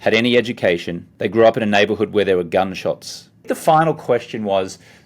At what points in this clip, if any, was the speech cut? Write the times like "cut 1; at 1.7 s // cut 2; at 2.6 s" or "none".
cut 1; at 1.0 s // cut 2; at 3.5 s